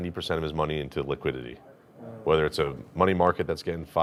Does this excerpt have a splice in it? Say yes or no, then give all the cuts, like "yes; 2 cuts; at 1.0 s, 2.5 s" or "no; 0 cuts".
no; 0 cuts